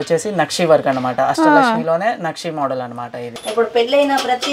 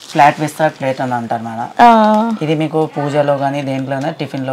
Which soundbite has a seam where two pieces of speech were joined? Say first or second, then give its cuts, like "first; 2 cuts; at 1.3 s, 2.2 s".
first; 1 cut; at 3.4 s